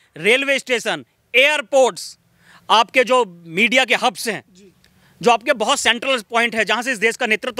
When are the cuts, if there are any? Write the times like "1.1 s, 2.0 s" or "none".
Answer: none

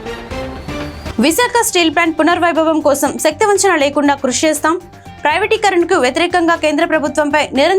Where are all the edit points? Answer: 1.1 s

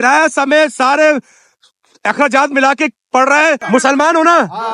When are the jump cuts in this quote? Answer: 3.6 s

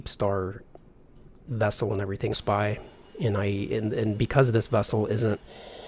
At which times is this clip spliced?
none

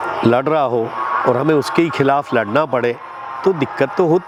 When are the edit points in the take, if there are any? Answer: none

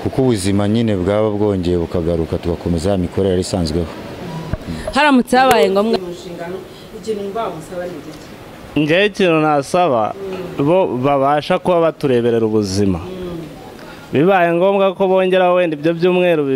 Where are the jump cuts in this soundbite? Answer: 5.9 s

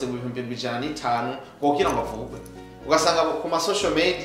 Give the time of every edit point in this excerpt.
none

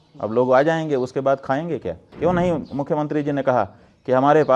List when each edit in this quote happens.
2.0 s

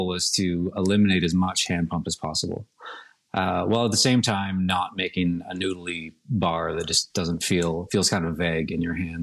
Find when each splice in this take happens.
none

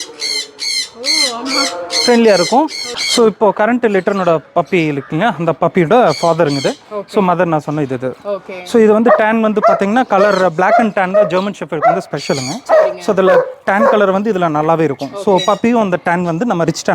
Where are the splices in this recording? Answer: 2.8 s

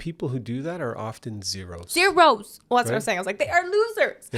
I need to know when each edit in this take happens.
none

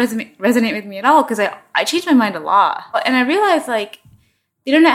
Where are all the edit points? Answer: 3.0 s

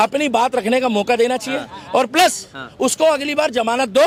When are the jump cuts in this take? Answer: none

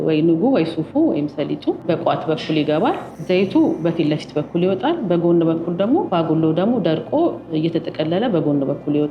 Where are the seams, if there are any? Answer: 1.8 s, 3.2 s, 6.1 s

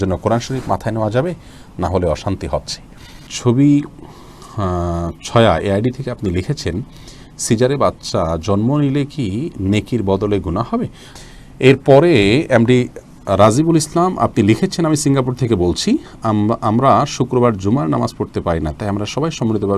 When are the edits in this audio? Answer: 3.3 s, 11.0 s

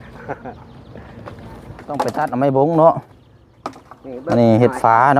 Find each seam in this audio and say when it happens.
2.1 s

